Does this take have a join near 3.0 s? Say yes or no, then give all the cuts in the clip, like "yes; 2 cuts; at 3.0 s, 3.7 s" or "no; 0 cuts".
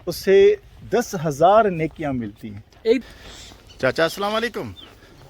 yes; 1 cut; at 3.0 s